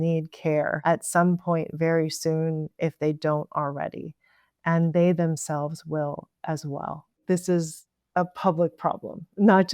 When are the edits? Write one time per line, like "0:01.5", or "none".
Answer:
0:07.2